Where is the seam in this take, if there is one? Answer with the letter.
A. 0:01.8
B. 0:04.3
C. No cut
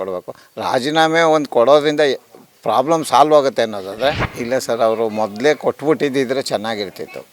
B